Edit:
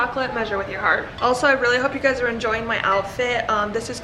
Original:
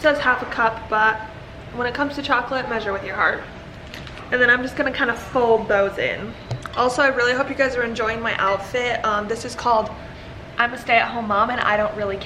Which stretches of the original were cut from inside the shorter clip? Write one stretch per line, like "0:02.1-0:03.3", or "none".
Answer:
0:03.4-0:06.6